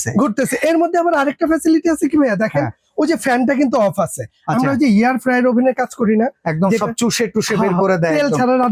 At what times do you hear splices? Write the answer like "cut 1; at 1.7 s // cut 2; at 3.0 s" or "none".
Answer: none